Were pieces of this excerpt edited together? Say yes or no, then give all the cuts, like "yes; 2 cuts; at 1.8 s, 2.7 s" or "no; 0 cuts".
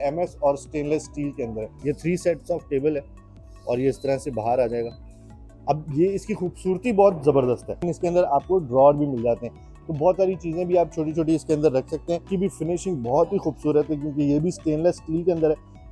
yes; 3 cuts; at 1.7 s, 7.9 s, 12.3 s